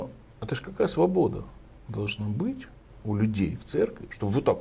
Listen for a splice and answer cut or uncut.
uncut